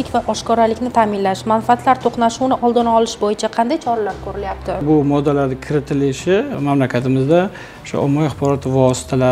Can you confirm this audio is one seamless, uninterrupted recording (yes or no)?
no